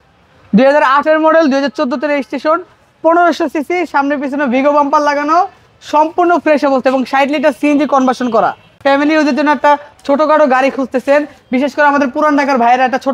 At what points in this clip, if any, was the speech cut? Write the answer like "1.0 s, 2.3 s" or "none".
8.8 s